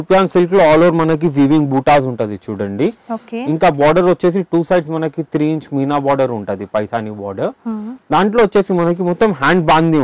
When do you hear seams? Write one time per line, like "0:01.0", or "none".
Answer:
none